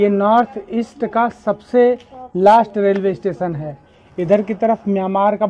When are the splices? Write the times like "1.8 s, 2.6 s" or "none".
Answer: none